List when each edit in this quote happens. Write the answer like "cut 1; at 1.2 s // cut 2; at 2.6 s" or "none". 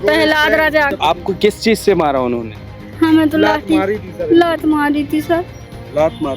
cut 1; at 1.0 s